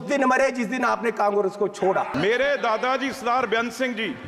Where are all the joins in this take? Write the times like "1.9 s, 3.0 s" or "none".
2.1 s